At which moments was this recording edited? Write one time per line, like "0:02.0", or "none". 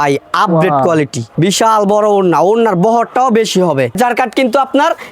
0:01.2
0:04.0